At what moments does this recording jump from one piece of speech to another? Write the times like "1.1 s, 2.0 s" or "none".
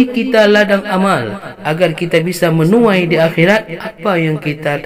none